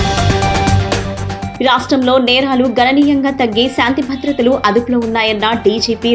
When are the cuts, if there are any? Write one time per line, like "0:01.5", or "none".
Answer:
none